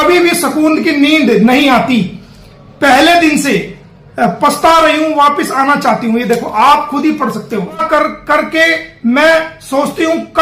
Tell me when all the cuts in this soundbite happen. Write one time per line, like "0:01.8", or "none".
0:07.8